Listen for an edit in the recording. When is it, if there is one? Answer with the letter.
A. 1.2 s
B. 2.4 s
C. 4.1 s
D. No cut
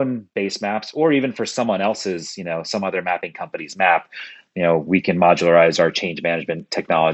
D